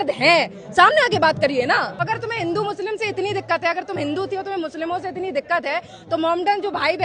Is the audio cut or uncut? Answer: cut